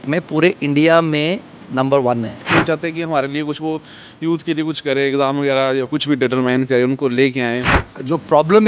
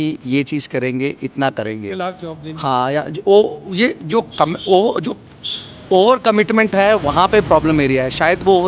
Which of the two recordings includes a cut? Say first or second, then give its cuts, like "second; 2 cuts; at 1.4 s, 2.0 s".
first; 2 cuts; at 2.4 s, 7.7 s